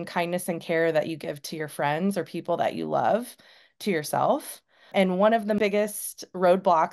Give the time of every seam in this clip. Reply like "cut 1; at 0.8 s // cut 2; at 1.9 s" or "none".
cut 1; at 4.9 s // cut 2; at 5.6 s